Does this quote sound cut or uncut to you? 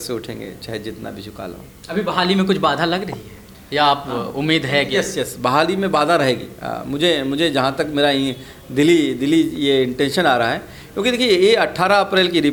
uncut